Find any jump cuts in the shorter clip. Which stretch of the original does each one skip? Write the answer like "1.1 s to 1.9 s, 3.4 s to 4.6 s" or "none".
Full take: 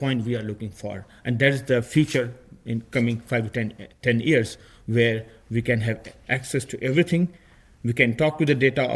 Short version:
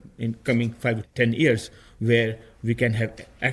3.5 s to 3.9 s